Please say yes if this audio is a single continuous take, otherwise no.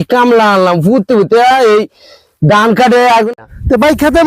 no